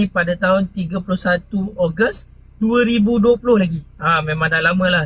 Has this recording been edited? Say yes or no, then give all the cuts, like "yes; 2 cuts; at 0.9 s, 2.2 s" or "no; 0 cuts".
no; 0 cuts